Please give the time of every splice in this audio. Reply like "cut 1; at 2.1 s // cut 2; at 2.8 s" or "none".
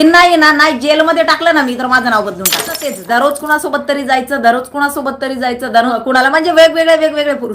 cut 1; at 2.9 s // cut 2; at 6.0 s